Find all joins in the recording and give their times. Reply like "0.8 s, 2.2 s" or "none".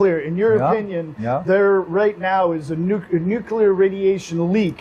none